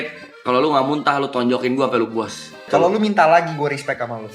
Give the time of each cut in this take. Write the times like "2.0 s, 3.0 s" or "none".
2.7 s